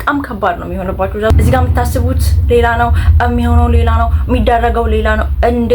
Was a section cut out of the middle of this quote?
yes; 1 cut; at 1.3 s

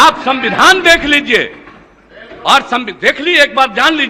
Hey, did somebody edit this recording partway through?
no; 0 cuts

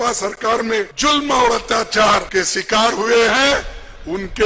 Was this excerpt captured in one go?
no; 2 cuts; at 0.9 s, 2.3 s

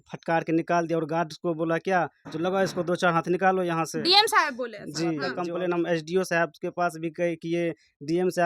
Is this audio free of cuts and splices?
no; 1 cut; at 5.3 s

